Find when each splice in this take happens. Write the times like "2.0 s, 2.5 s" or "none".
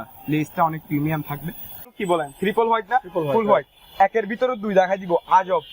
1.9 s